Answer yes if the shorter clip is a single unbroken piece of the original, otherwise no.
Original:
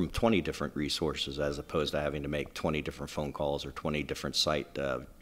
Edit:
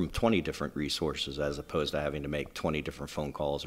yes